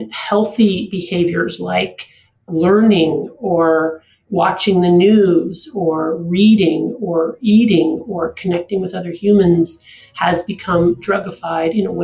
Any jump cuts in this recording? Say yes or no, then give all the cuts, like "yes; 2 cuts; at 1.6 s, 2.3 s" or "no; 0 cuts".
yes; 1 cut; at 2.4 s